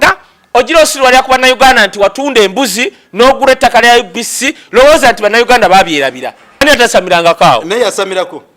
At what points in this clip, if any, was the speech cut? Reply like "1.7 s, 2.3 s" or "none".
6.6 s

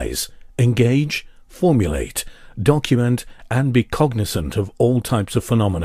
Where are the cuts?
none

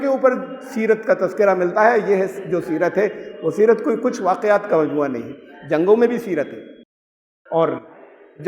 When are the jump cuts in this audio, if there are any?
none

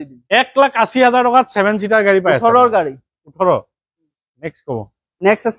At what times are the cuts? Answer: none

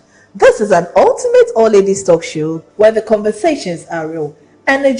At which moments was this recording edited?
4.0 s

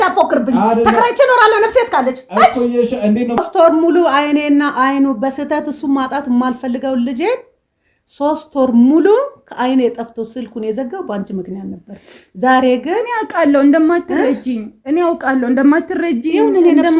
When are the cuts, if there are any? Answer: 3.4 s

